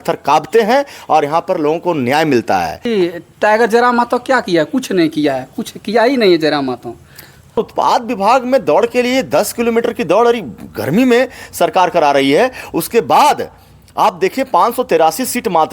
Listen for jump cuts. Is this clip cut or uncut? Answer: cut